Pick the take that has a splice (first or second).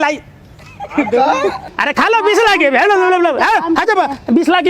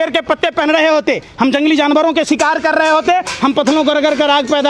first